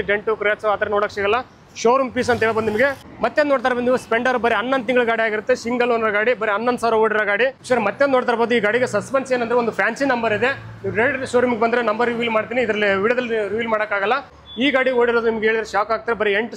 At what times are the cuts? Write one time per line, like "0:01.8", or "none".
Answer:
0:03.0
0:07.6
0:14.4